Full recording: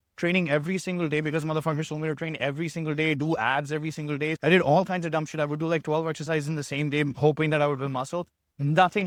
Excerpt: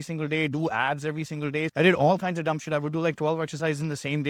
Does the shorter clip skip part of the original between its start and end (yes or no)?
no